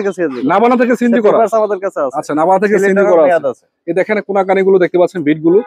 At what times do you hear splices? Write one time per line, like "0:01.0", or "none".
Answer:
none